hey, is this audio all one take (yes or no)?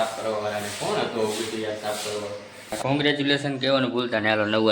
no